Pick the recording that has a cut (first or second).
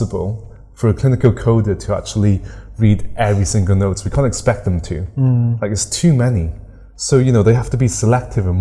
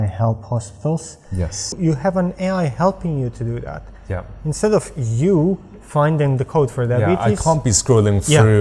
second